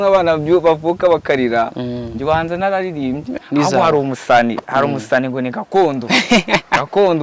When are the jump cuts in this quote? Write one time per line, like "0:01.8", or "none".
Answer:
0:03.3